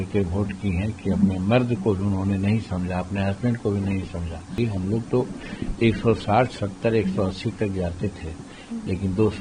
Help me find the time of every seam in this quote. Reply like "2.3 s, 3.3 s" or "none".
4.6 s